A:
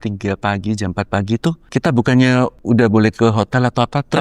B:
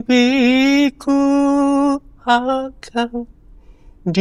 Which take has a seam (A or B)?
A